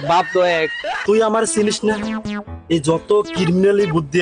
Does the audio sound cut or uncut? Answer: cut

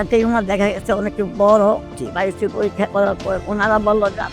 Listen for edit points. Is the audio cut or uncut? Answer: cut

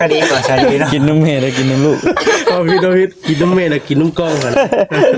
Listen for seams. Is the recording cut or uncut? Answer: uncut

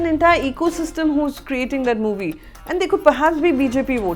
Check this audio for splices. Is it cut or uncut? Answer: uncut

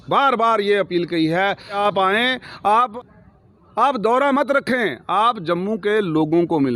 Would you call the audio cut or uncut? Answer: cut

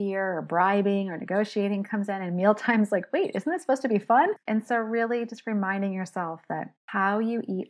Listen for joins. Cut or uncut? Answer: cut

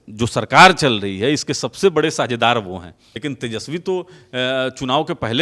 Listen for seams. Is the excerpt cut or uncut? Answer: cut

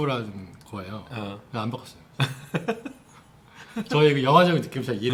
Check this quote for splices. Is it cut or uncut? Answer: uncut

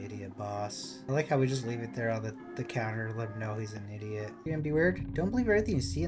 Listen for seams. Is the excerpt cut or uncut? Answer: cut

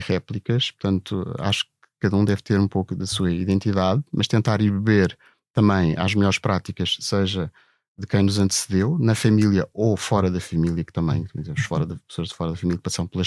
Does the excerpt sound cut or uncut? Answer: uncut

